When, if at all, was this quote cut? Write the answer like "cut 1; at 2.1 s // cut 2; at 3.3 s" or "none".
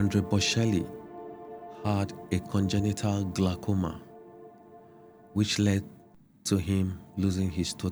none